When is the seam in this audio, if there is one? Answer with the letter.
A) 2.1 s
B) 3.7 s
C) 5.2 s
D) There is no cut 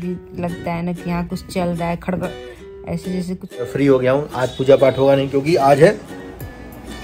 B